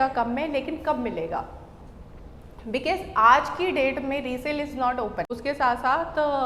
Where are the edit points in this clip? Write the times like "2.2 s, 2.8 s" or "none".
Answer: 5.4 s